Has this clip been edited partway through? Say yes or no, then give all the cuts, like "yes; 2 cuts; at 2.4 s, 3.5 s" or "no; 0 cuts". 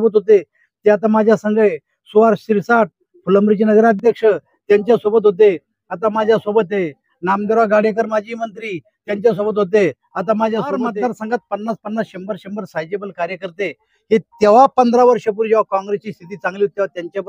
yes; 1 cut; at 10.9 s